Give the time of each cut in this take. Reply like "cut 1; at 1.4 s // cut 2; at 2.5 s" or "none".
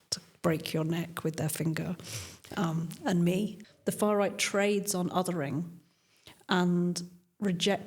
cut 1; at 3.6 s